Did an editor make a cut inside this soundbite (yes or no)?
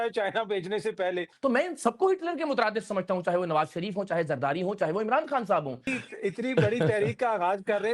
yes